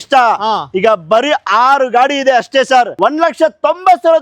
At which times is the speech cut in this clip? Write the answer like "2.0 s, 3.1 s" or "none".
2.9 s